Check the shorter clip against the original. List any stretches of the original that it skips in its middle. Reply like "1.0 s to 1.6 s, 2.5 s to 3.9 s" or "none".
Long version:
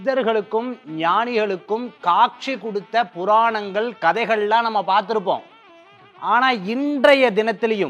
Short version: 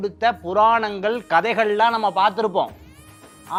none